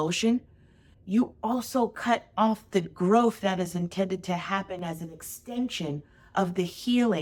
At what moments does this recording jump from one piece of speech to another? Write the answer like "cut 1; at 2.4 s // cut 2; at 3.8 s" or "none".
none

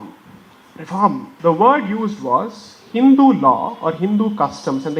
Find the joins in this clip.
cut 1; at 1.3 s

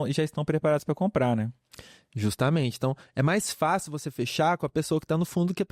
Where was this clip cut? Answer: none

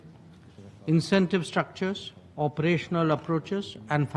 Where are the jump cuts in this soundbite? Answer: none

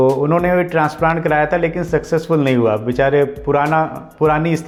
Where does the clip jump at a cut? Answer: none

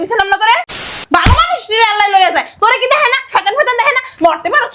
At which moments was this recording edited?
cut 1; at 0.9 s

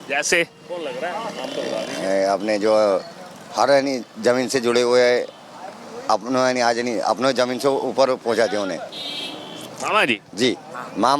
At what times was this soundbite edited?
none

